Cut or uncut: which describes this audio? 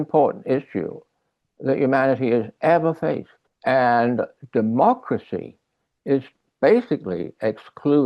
uncut